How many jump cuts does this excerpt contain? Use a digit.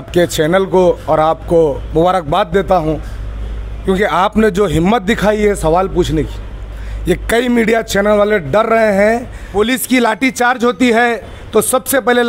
1